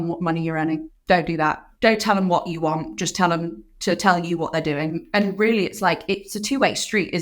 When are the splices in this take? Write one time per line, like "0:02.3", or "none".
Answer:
0:00.9
0:01.7
0:05.0